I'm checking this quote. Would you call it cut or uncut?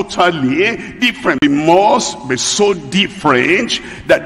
cut